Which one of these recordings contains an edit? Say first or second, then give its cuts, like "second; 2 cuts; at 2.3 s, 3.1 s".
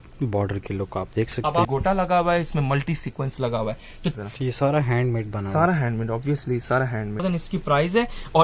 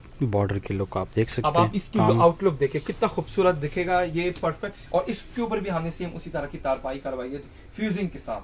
first; 3 cuts; at 1.7 s, 4.1 s, 7.2 s